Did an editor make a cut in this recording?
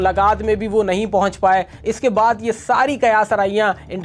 no; 0 cuts

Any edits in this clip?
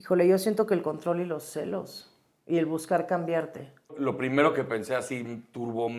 yes; 1 cut; at 3.9 s

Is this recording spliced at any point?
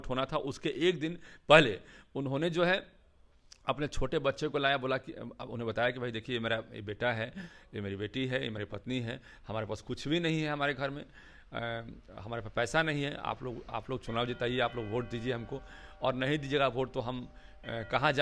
no; 0 cuts

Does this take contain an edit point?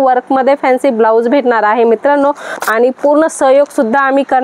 yes; 1 cut; at 2.5 s

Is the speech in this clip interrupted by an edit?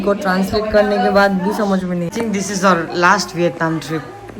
yes; 1 cut; at 2.1 s

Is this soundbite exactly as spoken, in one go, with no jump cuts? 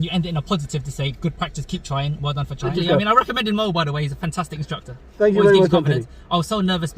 no; 1 cut; at 2.7 s

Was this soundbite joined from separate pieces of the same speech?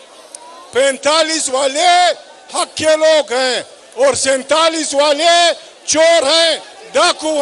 no; 0 cuts

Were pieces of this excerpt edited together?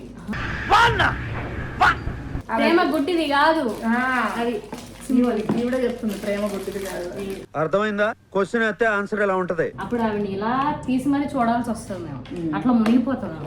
yes; 2 cuts; at 2.3 s, 9.8 s

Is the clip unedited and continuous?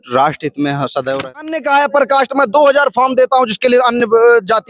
no; 1 cut; at 1.5 s

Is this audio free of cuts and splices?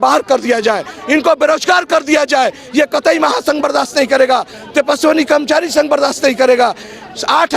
yes; 0 cuts

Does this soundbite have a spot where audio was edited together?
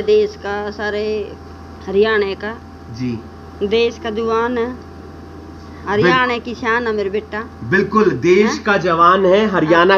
no; 0 cuts

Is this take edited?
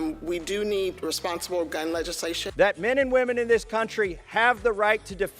yes; 1 cut; at 2.4 s

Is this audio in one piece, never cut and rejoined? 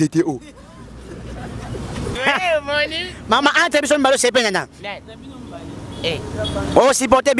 no; 1 cut; at 2.2 s

